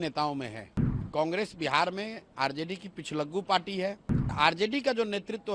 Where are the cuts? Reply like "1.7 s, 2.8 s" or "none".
1.1 s, 4.3 s